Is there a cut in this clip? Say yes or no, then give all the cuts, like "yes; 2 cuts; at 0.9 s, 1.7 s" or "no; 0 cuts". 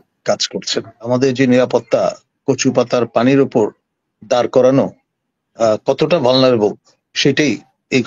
yes; 1 cut; at 0.9 s